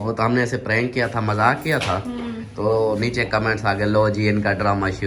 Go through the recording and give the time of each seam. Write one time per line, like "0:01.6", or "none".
none